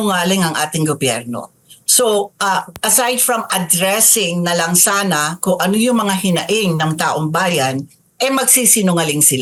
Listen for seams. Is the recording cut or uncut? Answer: uncut